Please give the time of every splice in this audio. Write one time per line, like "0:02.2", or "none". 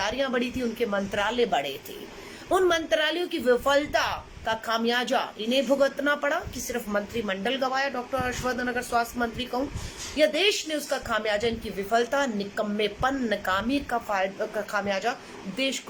none